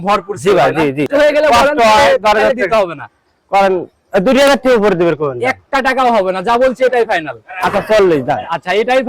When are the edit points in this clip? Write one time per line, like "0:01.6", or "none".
0:01.1